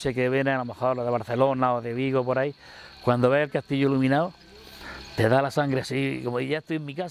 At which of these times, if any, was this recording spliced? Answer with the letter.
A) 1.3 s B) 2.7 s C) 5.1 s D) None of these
D